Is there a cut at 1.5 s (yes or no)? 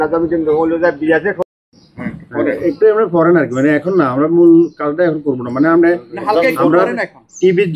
yes